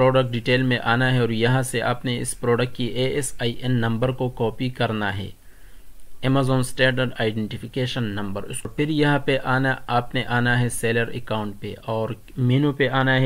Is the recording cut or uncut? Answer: uncut